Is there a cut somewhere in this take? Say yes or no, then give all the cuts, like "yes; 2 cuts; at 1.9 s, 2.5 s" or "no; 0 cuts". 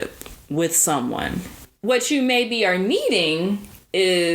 yes; 1 cut; at 1.6 s